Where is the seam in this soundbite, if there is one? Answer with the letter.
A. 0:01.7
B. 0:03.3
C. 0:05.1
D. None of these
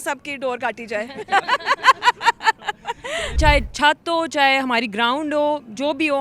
B